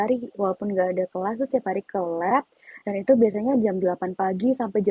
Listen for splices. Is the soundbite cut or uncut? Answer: uncut